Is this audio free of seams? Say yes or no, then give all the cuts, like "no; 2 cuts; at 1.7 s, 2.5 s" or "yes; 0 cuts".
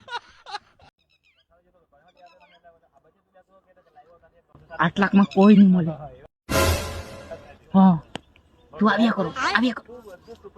no; 1 cut; at 0.9 s